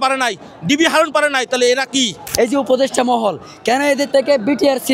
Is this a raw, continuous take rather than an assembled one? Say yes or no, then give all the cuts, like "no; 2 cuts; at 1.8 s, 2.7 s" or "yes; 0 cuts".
no; 1 cut; at 2.2 s